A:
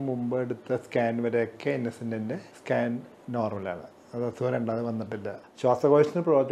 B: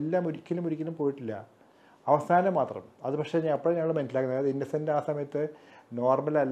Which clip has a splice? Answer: A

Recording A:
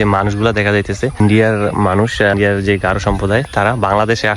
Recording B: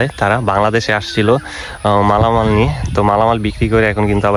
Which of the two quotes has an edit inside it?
A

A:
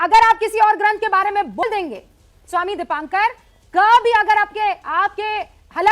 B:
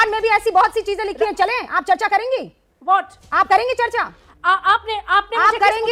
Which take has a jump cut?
A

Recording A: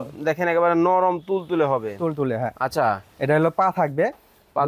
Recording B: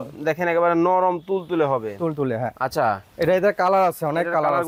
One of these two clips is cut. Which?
A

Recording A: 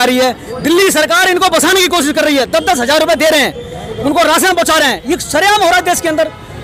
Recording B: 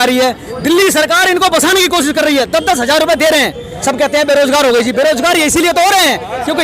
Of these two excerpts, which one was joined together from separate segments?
B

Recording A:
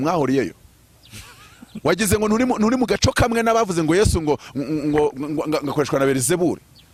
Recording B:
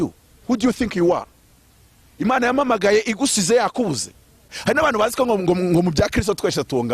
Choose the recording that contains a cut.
B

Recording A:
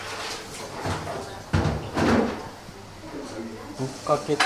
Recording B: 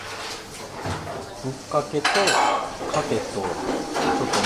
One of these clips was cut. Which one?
B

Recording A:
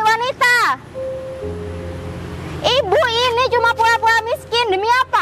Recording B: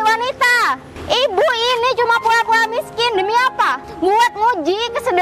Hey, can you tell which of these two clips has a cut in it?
B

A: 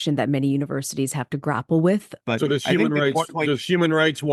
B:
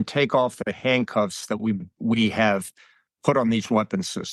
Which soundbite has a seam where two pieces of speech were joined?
A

